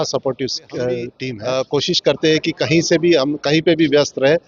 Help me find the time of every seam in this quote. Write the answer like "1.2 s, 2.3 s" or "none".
1.2 s